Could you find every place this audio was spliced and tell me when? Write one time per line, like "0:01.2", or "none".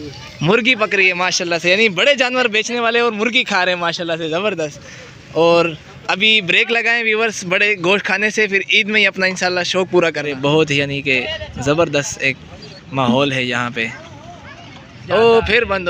0:10.3
0:15.0

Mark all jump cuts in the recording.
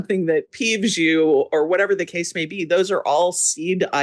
none

